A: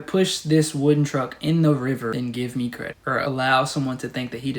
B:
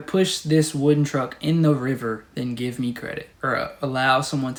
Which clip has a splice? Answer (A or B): A